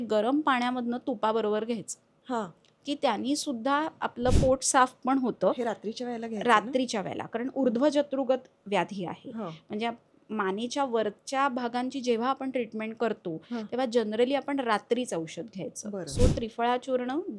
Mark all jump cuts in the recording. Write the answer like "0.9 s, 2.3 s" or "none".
none

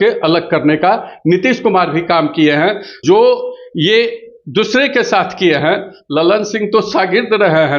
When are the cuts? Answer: 3.0 s

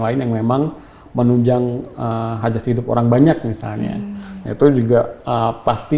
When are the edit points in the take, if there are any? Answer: none

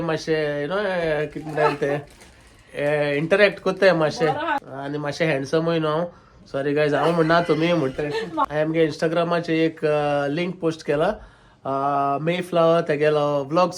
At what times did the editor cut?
4.7 s, 8.4 s

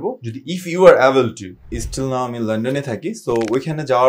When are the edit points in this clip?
1.8 s

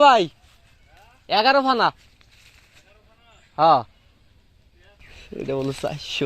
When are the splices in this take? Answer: 5.3 s

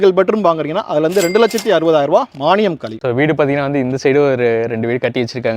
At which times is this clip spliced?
2.9 s

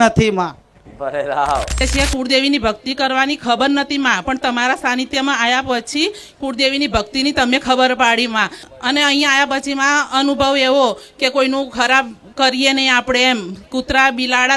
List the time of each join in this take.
1.8 s

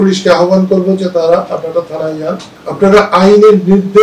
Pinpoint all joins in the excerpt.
none

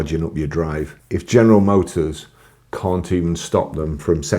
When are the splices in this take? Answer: 1.0 s

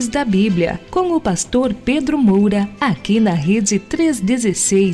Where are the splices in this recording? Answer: 2.7 s

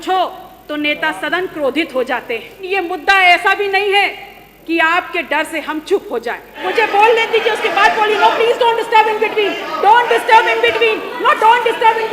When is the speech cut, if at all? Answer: 2.7 s, 6.6 s

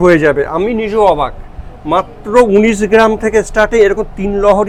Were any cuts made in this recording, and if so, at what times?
none

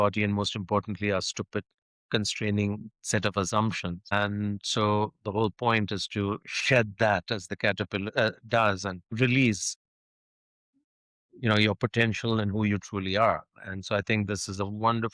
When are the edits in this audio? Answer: 4.1 s, 9.1 s

